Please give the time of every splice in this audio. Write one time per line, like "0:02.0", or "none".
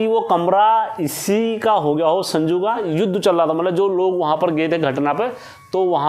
0:02.9